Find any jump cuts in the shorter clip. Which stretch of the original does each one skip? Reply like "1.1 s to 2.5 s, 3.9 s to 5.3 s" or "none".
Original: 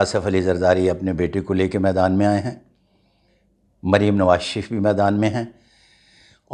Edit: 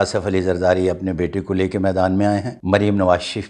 2.5 s to 3.7 s